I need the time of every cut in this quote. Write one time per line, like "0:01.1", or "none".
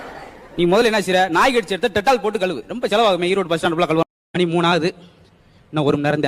0:04.2